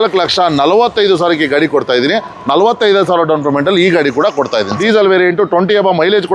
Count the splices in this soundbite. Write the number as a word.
one